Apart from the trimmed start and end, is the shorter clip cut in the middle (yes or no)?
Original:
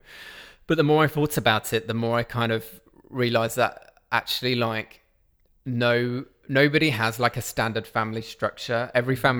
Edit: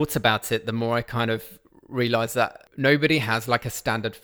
yes